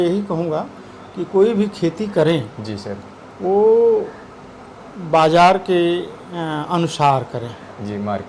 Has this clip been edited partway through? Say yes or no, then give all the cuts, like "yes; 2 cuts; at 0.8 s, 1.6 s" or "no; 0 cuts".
no; 0 cuts